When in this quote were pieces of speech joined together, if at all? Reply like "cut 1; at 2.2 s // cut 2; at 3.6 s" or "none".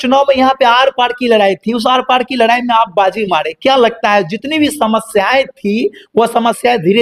none

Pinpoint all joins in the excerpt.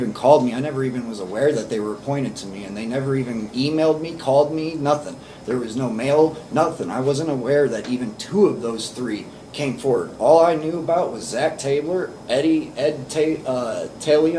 none

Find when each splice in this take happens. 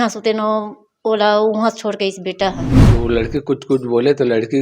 cut 1; at 2.7 s

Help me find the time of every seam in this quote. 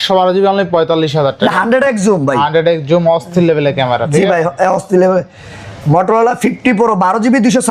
none

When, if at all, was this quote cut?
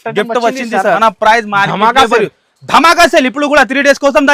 cut 1; at 1.0 s

